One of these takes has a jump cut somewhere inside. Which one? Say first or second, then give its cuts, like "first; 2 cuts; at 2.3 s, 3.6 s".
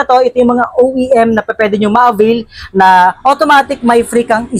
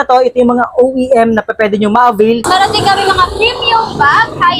second; 1 cut; at 2.4 s